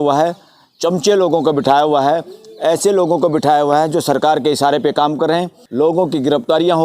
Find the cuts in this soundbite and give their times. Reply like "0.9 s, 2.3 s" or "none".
5.6 s